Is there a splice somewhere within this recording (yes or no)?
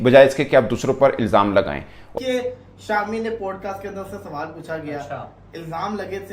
yes